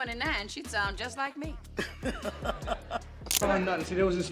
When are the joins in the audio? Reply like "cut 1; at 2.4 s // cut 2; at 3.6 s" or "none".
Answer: cut 1; at 3.4 s